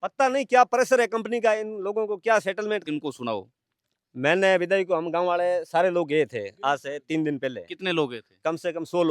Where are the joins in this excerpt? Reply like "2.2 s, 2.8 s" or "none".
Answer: 2.8 s